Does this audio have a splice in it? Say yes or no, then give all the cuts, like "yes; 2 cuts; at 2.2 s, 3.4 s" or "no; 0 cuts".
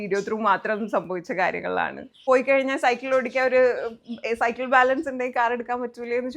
yes; 1 cut; at 2.1 s